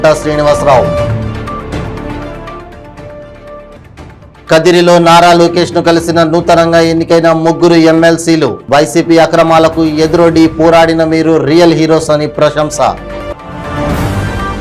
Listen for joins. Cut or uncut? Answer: uncut